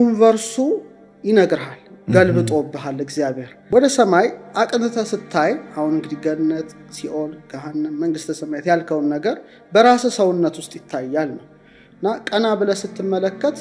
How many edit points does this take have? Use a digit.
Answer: 1